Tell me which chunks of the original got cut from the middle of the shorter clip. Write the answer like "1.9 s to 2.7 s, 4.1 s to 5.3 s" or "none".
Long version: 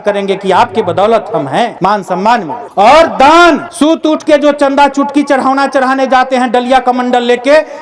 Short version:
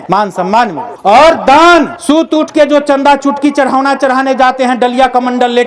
none